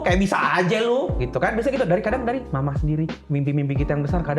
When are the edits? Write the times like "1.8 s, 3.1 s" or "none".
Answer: 3.2 s